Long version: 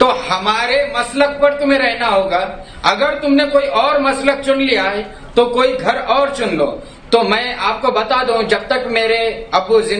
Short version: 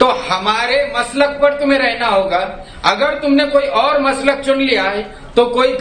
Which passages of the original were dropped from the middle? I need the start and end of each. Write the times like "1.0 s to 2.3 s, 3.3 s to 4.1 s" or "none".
none